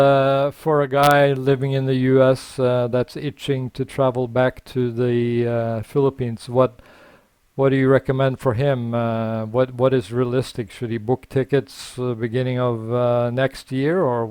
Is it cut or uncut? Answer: uncut